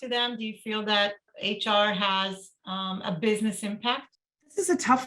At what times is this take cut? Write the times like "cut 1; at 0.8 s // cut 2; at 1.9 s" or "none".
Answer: cut 1; at 1.3 s